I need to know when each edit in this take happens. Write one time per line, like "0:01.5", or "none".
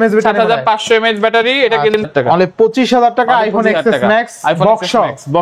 0:02.0